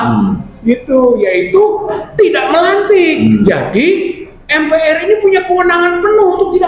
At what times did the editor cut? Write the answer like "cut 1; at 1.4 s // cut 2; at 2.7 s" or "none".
cut 1; at 3.4 s